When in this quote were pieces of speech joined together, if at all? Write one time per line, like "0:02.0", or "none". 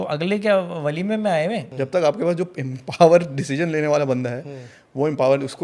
0:01.7